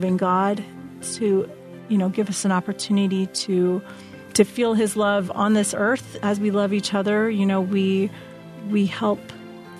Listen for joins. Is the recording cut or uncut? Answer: uncut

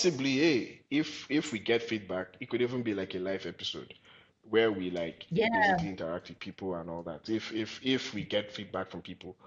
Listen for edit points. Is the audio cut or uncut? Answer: uncut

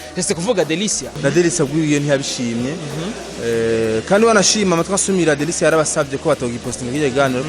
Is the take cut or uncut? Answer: cut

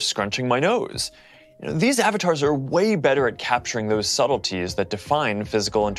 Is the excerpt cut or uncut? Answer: uncut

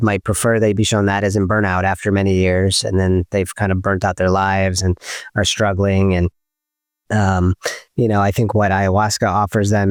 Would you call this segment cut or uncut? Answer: uncut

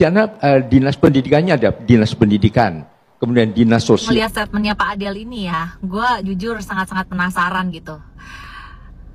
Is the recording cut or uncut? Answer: cut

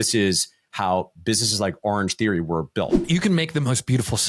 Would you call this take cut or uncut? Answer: cut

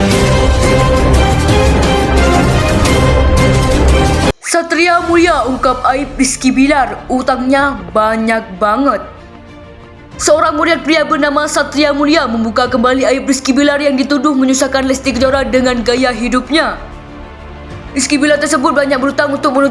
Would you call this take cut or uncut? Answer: cut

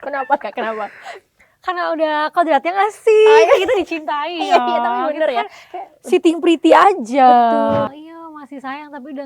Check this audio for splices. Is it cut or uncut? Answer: cut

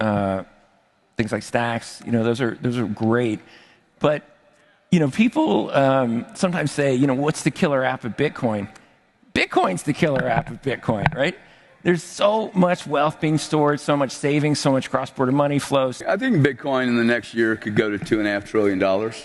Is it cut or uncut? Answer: cut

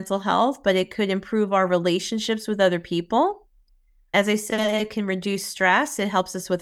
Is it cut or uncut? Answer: uncut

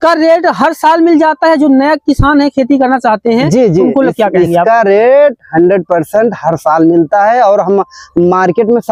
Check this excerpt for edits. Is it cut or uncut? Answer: uncut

